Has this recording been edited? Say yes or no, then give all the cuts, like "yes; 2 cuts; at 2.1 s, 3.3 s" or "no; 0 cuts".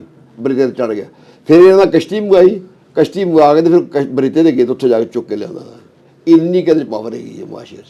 no; 0 cuts